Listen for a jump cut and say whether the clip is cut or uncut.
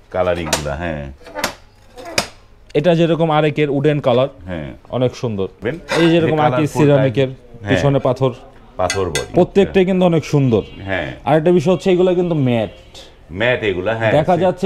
cut